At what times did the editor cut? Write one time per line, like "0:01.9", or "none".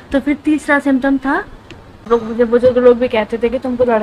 0:02.0

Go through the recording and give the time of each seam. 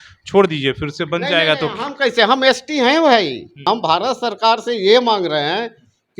0:03.6

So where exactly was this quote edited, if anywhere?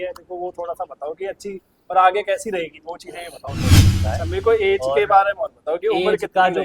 0:03.9

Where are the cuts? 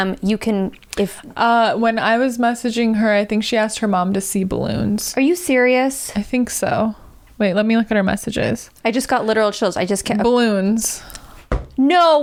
none

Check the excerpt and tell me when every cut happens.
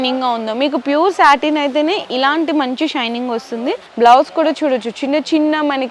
0:03.8

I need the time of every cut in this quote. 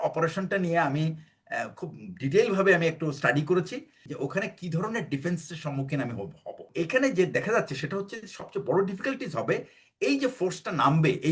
0:04.1
0:06.7

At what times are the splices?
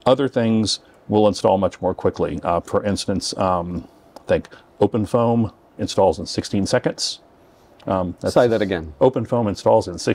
none

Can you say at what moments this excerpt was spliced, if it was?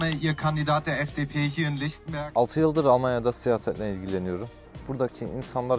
0:02.1
0:04.6

